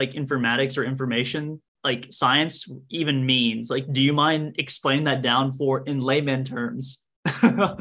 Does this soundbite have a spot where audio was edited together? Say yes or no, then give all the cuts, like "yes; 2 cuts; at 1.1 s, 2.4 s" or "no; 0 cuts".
no; 0 cuts